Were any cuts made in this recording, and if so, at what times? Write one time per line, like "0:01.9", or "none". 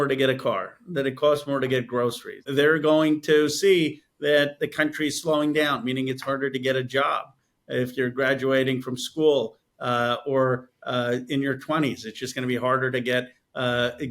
0:02.5